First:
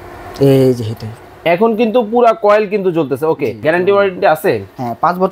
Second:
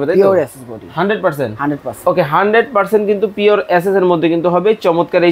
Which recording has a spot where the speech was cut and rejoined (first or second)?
first